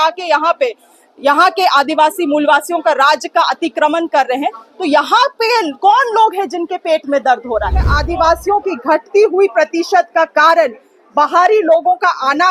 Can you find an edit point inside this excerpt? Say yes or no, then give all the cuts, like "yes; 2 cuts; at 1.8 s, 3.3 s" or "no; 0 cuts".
yes; 1 cut; at 8.0 s